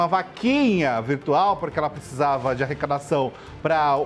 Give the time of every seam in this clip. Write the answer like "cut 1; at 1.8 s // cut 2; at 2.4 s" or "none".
none